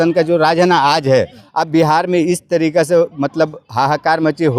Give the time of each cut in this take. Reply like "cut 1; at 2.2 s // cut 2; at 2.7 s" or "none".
cut 1; at 1.4 s

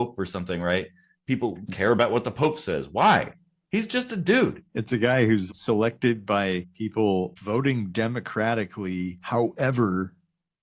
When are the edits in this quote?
cut 1; at 4.7 s // cut 2; at 5.5 s // cut 3; at 6.7 s // cut 4; at 7.4 s // cut 5; at 9.2 s

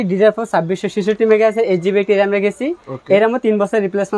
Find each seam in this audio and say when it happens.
none

